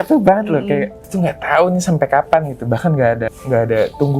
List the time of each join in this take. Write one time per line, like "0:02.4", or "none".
0:01.0
0:03.3